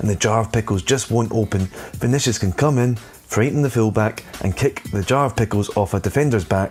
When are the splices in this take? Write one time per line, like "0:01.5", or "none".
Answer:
none